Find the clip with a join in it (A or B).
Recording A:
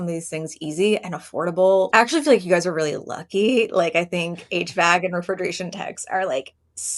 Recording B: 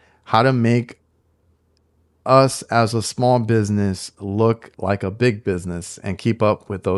A